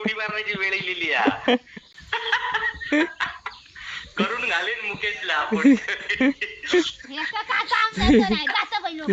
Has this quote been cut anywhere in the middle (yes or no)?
yes